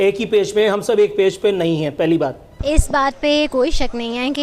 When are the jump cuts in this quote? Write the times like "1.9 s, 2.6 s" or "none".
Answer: 2.5 s